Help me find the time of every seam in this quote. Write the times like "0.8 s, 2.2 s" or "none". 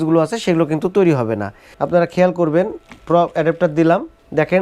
1.7 s